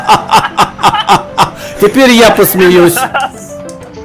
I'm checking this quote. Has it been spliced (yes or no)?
no